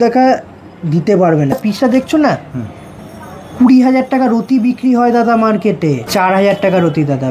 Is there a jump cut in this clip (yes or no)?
yes